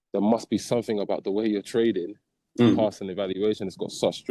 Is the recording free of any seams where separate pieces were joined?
yes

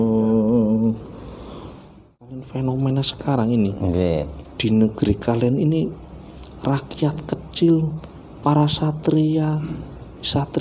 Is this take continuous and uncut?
no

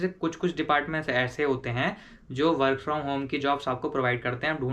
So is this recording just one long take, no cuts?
yes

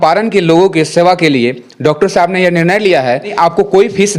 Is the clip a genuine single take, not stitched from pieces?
no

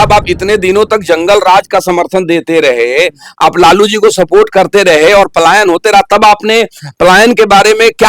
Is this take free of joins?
yes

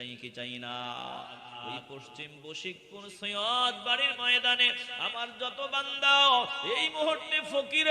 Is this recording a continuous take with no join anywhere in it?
no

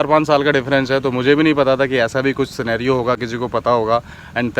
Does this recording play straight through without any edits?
yes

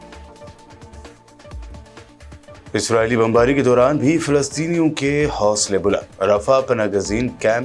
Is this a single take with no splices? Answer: yes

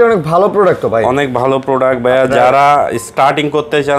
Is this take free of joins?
yes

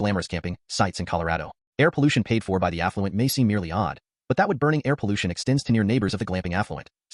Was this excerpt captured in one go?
yes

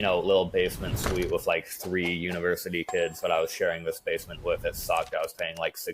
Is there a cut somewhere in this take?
no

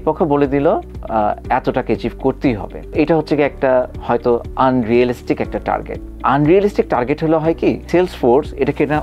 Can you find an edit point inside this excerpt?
no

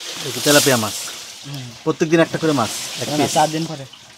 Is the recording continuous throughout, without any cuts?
yes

